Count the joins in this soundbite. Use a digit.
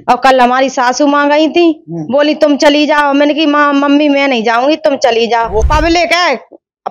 1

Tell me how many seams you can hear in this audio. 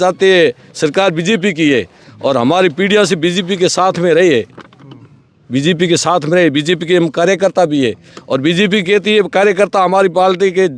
0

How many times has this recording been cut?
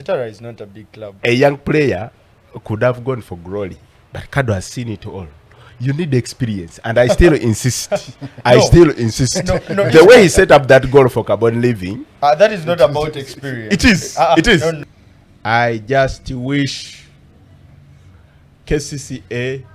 2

